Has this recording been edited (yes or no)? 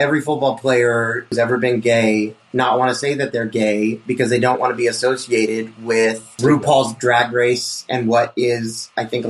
yes